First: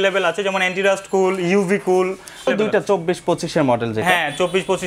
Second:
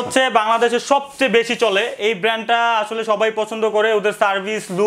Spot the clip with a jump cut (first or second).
first